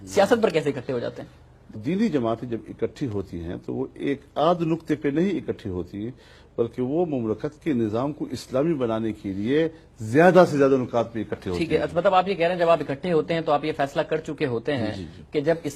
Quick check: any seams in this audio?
no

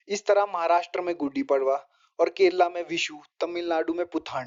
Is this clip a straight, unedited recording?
yes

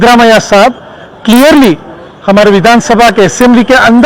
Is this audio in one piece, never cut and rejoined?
yes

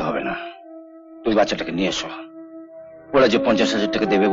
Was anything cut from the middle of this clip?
no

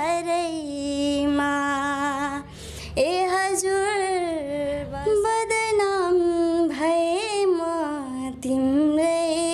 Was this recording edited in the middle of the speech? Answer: yes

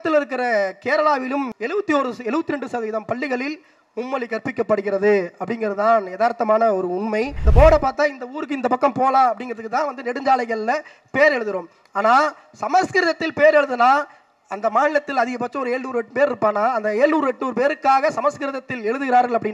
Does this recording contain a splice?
yes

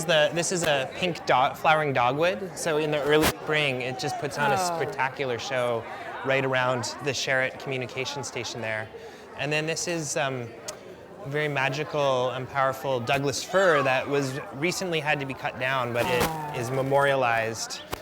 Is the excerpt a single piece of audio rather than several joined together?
no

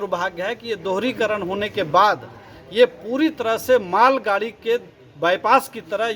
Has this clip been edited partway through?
no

